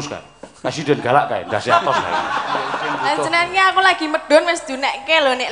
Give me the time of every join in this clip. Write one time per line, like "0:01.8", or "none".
0:02.9